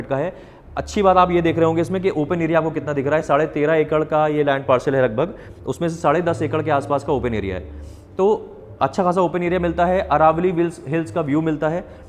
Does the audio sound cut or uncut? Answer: uncut